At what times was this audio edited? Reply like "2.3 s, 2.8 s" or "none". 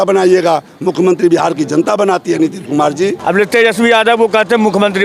3.2 s